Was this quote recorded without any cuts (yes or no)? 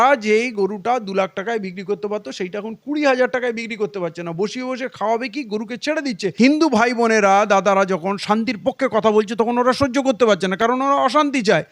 no